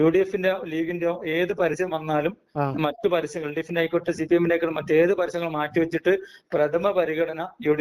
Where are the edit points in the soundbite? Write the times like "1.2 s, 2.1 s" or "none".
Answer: none